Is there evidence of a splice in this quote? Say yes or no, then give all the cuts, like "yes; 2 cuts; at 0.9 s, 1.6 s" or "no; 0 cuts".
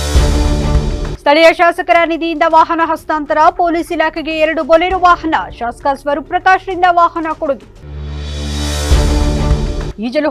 no; 0 cuts